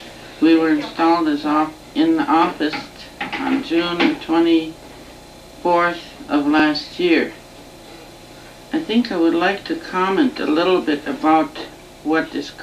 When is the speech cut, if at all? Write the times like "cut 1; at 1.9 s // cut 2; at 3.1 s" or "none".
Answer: none